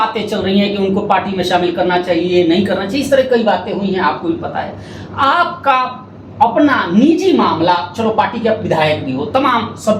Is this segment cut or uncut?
uncut